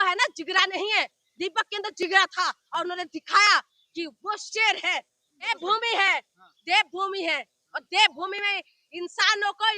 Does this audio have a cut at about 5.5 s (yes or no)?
yes